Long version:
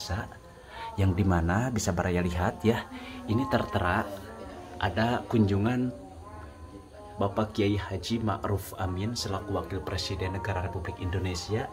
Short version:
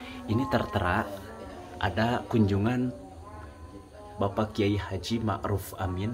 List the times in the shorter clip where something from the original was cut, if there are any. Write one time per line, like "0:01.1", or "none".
none